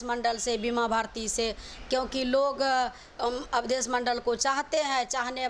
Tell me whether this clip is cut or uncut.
uncut